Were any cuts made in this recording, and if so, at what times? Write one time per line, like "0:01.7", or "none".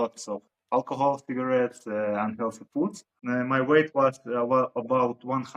0:03.1

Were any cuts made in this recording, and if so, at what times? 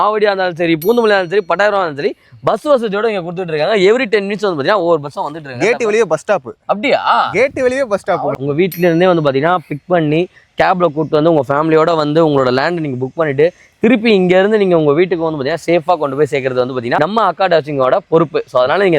0:08.3

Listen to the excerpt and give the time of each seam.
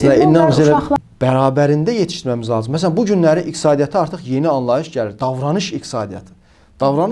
0:01.0

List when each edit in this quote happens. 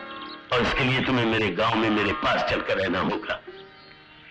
none

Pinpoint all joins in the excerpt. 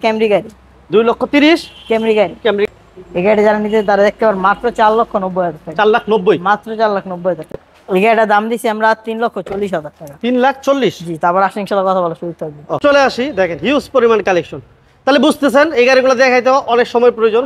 0:02.7
0:07.5
0:12.8

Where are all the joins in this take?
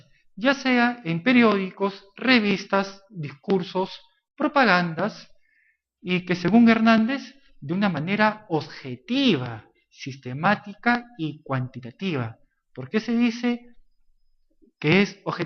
none

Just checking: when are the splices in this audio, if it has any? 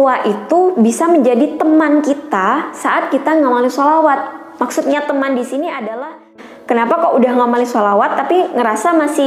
0:06.3

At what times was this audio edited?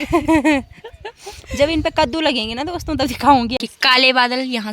0:03.5

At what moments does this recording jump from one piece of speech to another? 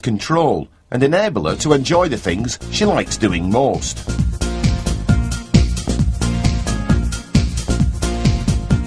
none

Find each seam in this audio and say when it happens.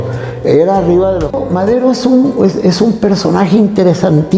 0:01.4

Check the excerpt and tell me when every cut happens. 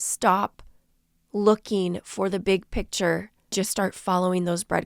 0:03.5

